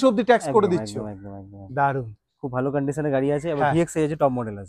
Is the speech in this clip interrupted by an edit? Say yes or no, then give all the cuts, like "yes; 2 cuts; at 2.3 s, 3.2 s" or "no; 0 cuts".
no; 0 cuts